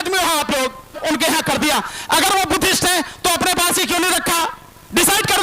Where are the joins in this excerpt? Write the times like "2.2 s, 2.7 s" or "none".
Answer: 1.0 s